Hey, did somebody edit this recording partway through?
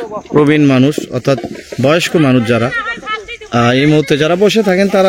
no; 0 cuts

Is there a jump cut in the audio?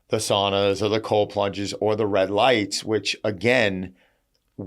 no; 0 cuts

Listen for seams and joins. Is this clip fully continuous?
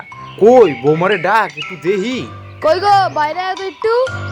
no; 1 cut; at 2.4 s

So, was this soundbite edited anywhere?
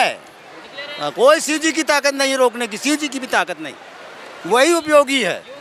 yes; 1 cut; at 4.3 s

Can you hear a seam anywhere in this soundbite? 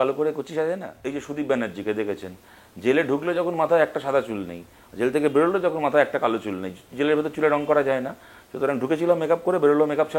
yes; 1 cut; at 0.9 s

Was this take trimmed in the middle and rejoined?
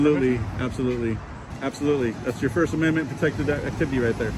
yes; 1 cut; at 1.5 s

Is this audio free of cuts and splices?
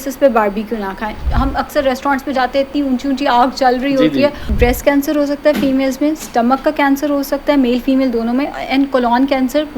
no; 2 cuts; at 1.2 s, 4.5 s

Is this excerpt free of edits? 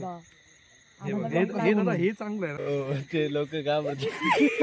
no; 1 cut; at 2.6 s

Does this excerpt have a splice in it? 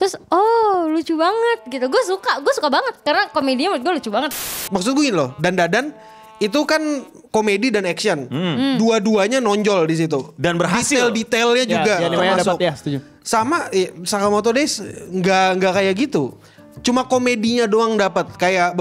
yes; 1 cut; at 4.4 s

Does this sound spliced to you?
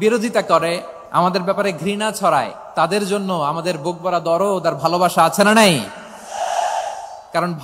yes; 1 cut; at 0.9 s

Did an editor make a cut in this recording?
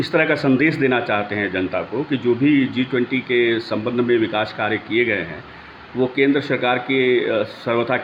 no; 0 cuts

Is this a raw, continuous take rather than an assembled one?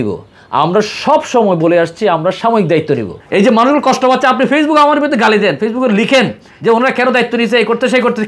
no; 1 cut; at 3.2 s

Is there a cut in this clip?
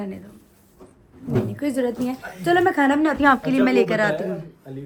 no; 0 cuts

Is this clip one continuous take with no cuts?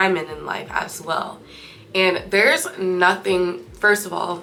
yes; 0 cuts

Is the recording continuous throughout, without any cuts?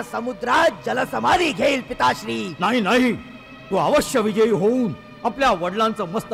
yes; 0 cuts

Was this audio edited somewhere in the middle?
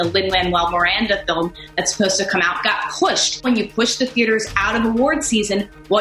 yes; 1 cut; at 3.5 s

